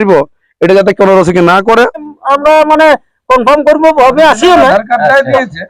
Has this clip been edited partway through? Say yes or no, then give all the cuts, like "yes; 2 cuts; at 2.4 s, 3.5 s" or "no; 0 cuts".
yes; 1 cut; at 2.1 s